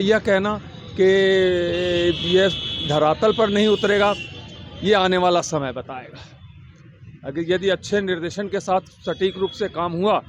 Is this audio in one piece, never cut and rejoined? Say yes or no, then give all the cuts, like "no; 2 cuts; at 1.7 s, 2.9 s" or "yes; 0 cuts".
yes; 0 cuts